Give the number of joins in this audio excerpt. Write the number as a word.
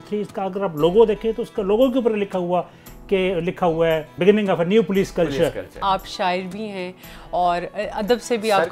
two